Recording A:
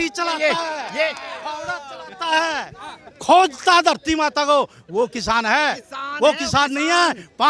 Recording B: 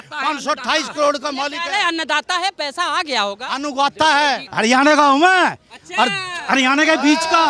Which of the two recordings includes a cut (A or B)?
B